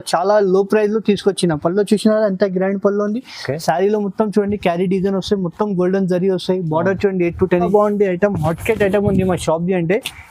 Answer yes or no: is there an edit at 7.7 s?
yes